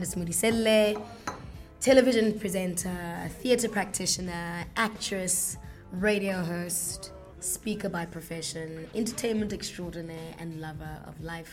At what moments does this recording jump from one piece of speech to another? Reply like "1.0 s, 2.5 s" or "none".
none